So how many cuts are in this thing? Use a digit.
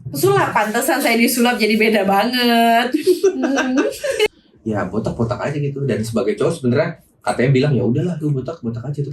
1